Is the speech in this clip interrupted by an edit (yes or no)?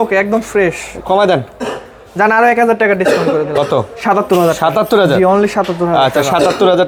no